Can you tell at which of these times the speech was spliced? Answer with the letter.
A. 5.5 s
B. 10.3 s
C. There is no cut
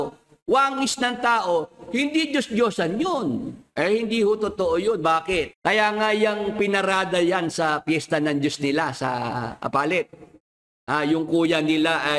A